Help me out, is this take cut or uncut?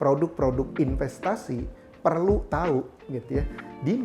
uncut